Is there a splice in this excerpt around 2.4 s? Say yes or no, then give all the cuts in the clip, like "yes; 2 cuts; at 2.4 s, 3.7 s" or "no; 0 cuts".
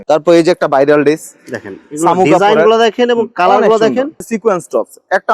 no; 1 cut; at 4.3 s